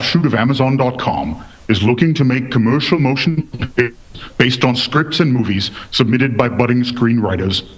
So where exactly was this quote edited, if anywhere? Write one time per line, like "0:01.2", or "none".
none